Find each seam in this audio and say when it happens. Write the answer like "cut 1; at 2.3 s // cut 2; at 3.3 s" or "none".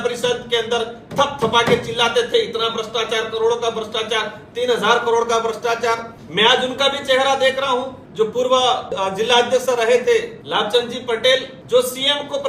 cut 1; at 6.1 s // cut 2; at 8.0 s // cut 3; at 8.9 s // cut 4; at 10.4 s // cut 5; at 11.8 s